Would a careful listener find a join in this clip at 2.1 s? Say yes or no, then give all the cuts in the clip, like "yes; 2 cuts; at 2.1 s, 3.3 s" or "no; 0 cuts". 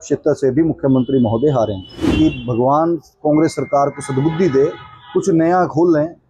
yes; 1 cut; at 2.1 s